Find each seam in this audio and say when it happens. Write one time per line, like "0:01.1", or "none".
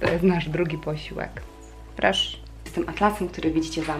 0:01.4
0:02.6